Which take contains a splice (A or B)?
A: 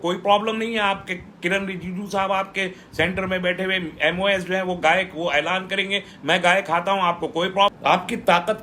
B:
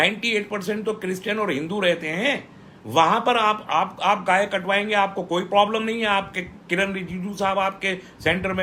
A